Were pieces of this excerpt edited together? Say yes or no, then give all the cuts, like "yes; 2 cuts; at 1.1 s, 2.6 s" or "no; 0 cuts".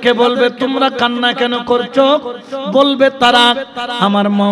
no; 0 cuts